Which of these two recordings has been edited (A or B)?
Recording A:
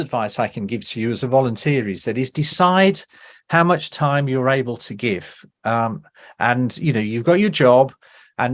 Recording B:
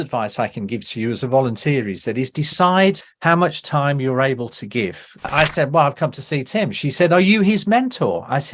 B